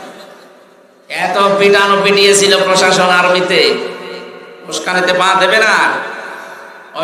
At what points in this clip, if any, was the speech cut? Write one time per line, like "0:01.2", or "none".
none